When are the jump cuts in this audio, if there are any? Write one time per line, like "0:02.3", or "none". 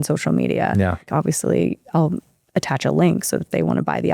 0:01.1